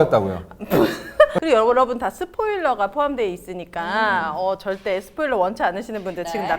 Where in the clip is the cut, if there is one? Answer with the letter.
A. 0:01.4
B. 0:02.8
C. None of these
A